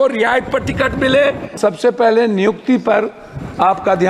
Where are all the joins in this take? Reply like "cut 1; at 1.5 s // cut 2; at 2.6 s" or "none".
cut 1; at 1.6 s